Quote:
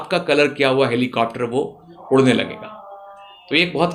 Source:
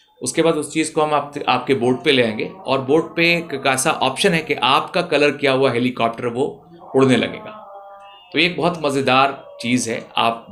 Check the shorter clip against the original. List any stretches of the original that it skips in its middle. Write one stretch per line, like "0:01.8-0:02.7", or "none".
none